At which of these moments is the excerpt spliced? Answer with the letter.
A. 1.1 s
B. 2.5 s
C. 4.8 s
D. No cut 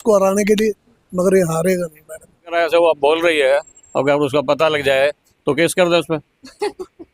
B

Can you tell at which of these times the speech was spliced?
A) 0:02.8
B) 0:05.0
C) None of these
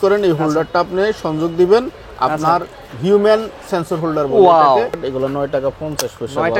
B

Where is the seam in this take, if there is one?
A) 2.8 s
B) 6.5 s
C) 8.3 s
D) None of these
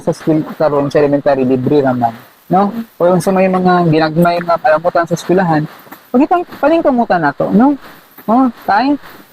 A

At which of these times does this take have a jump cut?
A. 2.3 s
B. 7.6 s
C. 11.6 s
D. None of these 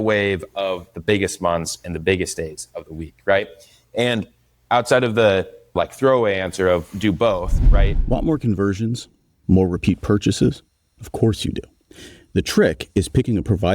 B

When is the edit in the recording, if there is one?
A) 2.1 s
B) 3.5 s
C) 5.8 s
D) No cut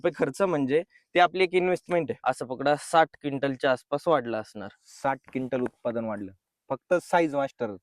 A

